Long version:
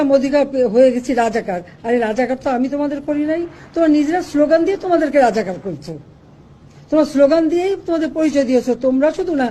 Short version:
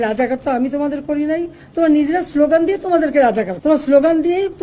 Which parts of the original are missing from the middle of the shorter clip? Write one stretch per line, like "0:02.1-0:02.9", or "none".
0:05.5-0:06.8